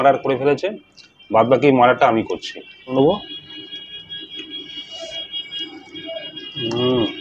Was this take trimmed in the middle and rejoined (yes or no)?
yes